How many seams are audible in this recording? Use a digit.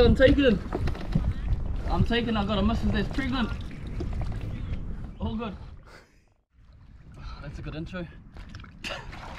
0